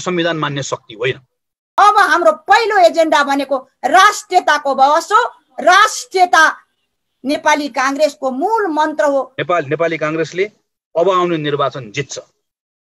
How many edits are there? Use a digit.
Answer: 2